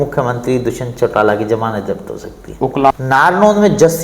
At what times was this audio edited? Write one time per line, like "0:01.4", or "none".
0:02.9